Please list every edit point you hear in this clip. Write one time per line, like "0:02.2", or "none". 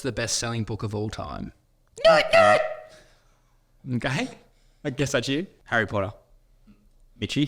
0:05.6